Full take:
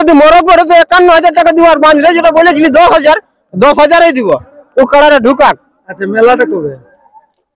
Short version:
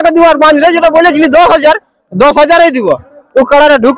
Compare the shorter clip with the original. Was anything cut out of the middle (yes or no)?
no